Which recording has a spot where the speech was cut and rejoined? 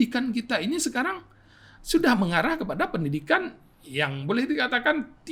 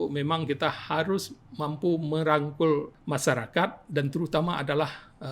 second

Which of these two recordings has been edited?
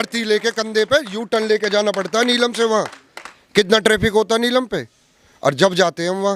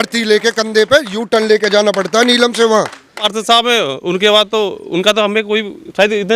second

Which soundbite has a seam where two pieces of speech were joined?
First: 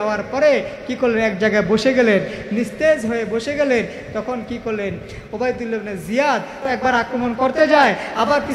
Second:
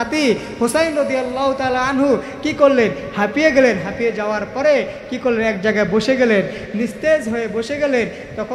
first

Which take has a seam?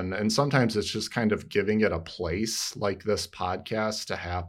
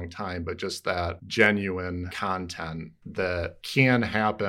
second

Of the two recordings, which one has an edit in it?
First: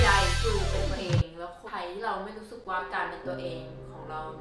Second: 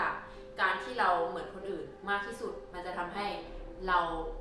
first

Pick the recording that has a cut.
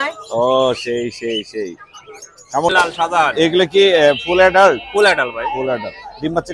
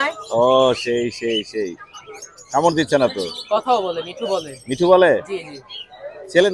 first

